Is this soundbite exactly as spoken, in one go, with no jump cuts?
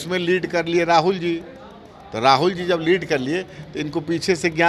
yes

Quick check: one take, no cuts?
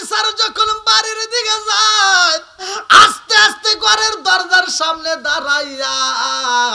yes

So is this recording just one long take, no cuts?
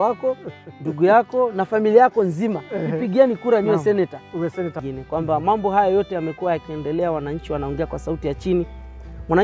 no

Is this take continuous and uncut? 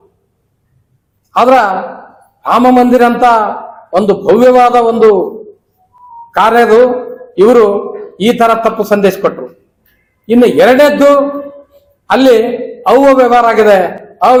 yes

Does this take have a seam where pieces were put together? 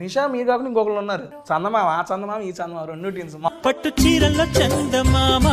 yes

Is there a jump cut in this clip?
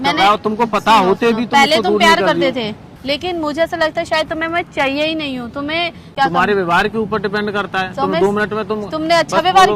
yes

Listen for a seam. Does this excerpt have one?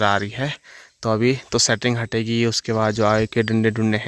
no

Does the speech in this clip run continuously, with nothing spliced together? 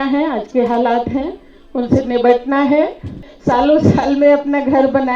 no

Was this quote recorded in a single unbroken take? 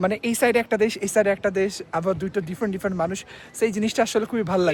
yes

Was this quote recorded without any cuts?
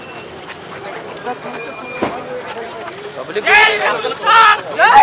yes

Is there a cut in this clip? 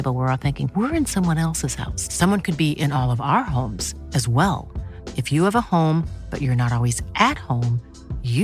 no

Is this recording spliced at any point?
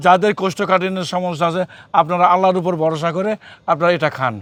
no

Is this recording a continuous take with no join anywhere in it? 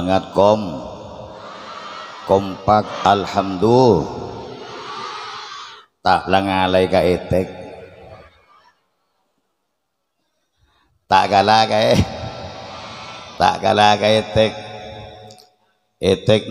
no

